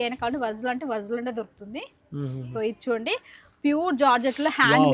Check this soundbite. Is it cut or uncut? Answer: uncut